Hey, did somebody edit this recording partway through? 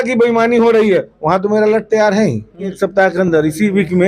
yes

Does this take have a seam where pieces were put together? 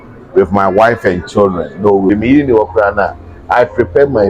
yes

